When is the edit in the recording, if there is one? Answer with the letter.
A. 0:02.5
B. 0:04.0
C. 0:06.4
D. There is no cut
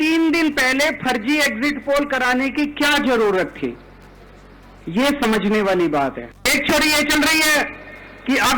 C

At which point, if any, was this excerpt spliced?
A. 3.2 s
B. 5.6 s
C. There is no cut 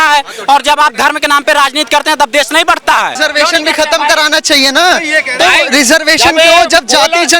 A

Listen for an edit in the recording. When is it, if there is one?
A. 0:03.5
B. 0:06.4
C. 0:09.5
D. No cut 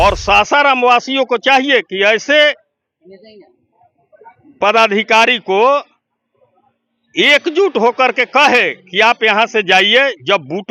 D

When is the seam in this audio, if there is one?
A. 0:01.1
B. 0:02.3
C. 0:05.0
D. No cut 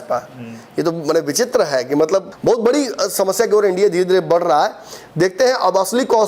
B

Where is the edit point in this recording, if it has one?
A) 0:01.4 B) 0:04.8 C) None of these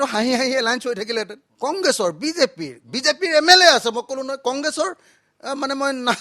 A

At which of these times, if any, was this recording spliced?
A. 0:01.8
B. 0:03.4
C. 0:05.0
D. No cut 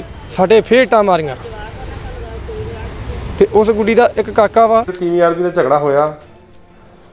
C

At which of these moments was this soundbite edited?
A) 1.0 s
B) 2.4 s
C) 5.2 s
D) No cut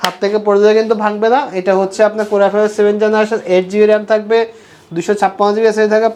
D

